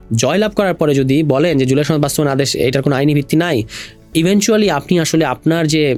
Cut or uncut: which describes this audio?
uncut